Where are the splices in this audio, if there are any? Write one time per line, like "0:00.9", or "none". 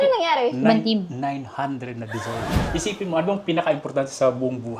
0:02.5